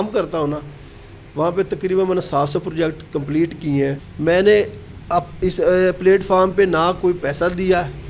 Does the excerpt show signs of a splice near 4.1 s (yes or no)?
yes